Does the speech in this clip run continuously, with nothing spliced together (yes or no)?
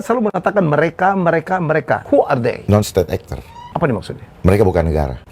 no